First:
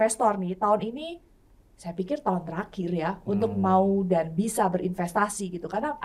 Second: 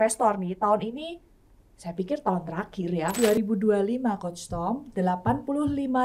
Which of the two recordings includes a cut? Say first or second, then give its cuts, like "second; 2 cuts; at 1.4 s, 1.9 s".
second; 1 cut; at 3.3 s